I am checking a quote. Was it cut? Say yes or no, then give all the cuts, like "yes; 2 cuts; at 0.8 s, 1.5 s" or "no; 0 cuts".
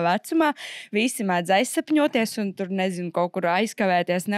no; 0 cuts